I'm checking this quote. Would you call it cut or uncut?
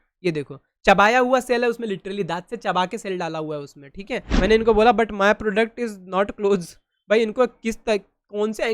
cut